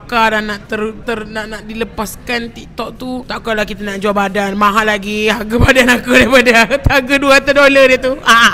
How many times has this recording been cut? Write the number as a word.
zero